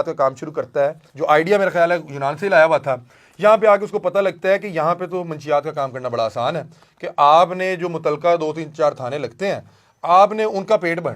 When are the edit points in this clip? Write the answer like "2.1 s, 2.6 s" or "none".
1.1 s